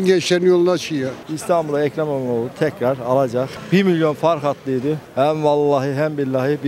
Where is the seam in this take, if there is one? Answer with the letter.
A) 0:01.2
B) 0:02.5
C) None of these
A